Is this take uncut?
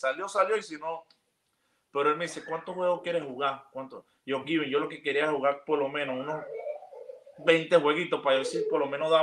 yes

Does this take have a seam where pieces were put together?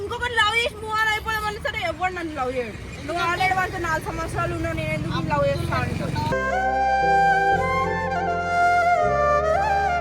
no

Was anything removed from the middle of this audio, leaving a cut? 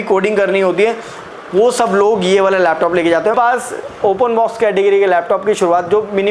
yes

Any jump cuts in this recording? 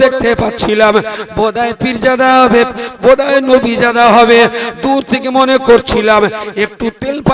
no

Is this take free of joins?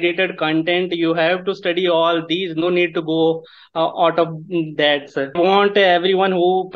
no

